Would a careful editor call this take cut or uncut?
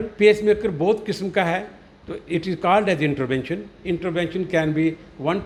uncut